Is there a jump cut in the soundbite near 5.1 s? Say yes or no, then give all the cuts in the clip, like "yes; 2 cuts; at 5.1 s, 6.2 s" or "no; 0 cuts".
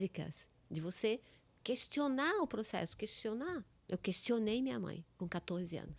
yes; 2 cuts; at 3.7 s, 5.1 s